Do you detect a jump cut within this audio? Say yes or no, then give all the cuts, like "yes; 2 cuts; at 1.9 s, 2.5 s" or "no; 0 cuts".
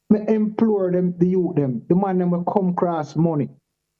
no; 0 cuts